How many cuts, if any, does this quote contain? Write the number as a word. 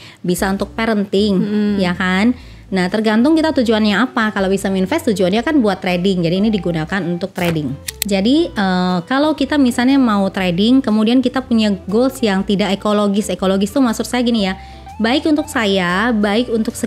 one